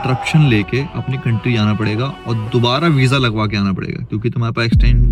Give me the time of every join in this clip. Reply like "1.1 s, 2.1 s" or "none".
none